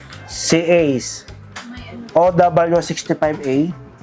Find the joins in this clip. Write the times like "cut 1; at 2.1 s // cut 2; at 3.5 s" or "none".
none